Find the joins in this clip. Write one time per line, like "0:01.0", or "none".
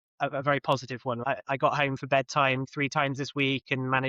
0:01.2
0:02.7